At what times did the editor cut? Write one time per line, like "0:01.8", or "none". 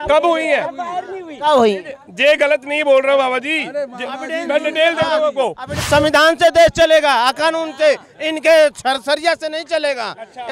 0:05.7